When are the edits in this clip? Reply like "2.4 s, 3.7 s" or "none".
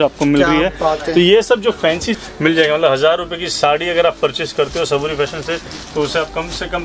2.1 s